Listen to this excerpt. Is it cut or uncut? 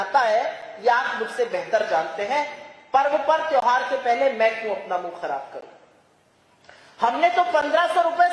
uncut